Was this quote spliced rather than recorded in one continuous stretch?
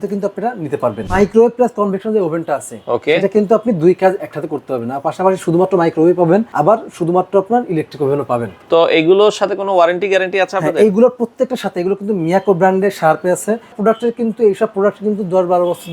yes; 4 cuts; at 1.1 s, 6.5 s, 8.5 s, 13.8 s

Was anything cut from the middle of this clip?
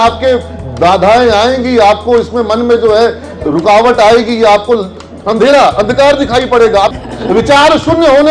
yes; 2 cuts; at 5.0 s, 6.9 s

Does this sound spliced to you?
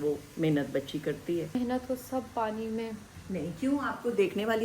yes; 2 cuts; at 1.6 s, 3.1 s

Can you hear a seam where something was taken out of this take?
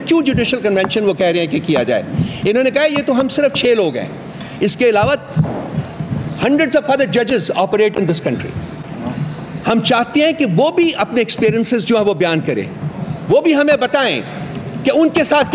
no; 0 cuts

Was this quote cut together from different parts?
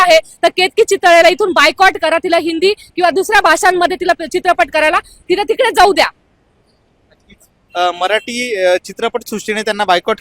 no; 0 cuts

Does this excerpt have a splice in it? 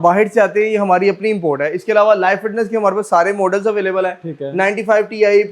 no; 0 cuts

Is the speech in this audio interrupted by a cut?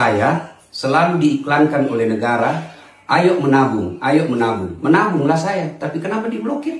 no; 0 cuts

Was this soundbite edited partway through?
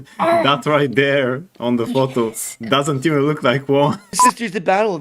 yes; 1 cut; at 4.1 s

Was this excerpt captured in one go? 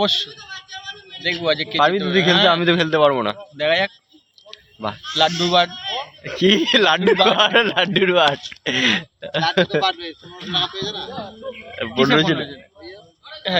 yes; 0 cuts

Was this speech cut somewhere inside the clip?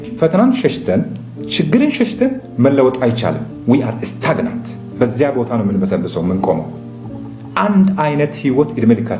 no; 0 cuts

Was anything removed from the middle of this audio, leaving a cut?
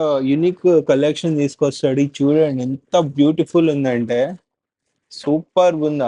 no; 0 cuts

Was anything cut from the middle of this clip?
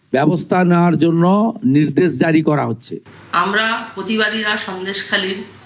yes; 1 cut; at 3.2 s

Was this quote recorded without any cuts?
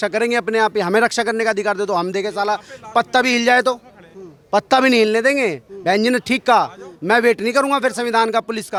yes; 0 cuts

